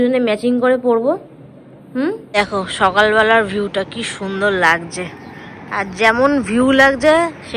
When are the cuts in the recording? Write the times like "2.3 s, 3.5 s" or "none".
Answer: 2.4 s